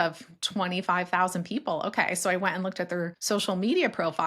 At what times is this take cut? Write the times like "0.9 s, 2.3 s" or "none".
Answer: 3.2 s